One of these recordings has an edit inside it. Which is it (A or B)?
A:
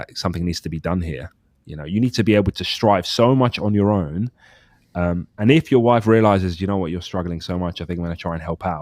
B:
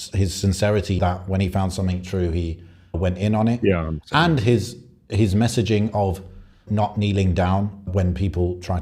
B